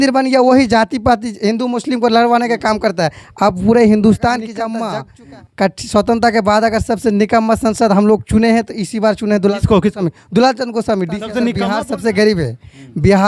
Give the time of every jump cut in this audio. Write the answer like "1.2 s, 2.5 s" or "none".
4.7 s, 11.6 s